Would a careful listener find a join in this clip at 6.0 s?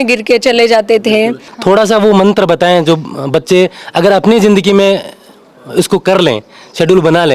no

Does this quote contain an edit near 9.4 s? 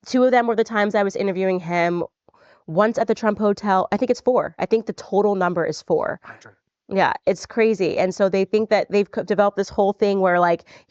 yes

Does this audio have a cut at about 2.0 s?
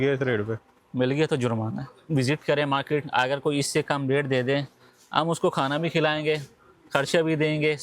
yes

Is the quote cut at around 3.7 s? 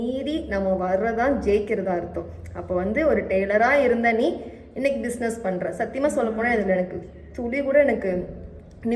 no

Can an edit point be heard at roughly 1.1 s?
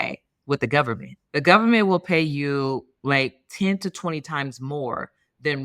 yes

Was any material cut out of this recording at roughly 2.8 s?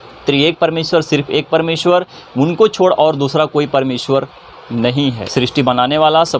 no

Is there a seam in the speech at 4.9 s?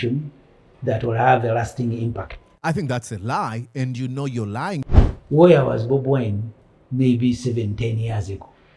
yes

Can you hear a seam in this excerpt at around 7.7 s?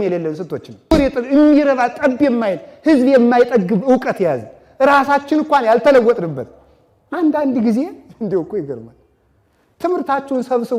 no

